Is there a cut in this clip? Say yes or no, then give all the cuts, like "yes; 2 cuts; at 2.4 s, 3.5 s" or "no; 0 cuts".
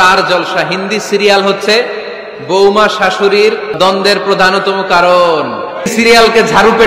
yes; 2 cuts; at 3.8 s, 5.9 s